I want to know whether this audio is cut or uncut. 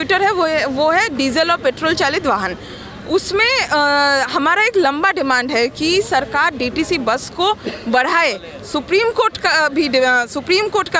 uncut